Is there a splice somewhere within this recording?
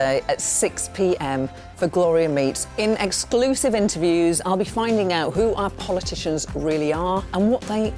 no; 0 cuts

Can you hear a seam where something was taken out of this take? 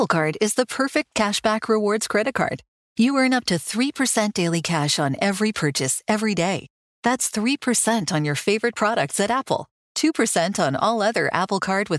no; 0 cuts

